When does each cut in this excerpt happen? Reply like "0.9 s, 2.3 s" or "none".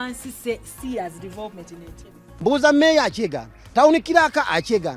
2.2 s